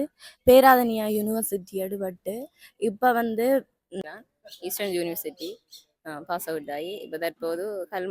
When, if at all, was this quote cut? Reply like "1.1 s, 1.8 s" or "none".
4.0 s